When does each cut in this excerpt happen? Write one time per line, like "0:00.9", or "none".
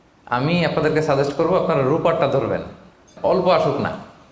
0:03.1

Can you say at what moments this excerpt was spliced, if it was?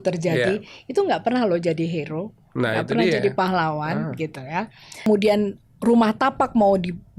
0:05.1

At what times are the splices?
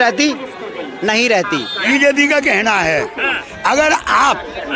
0:01.9

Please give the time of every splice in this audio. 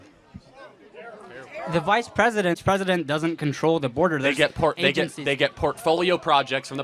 0:02.6

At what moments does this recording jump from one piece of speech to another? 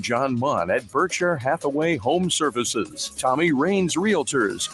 none

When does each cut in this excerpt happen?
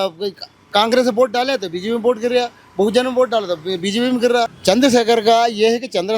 0:04.5

